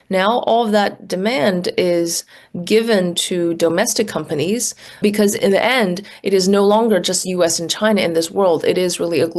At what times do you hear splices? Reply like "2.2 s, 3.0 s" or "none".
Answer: 4.8 s